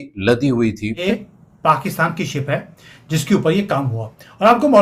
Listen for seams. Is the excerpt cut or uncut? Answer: cut